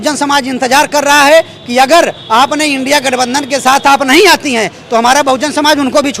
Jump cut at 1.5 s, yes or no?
no